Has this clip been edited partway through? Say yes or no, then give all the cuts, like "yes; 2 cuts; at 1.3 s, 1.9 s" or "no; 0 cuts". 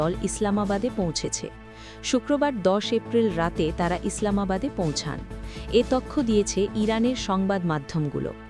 no; 0 cuts